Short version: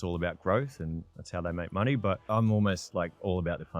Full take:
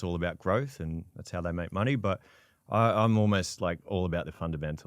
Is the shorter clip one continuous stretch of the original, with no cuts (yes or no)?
no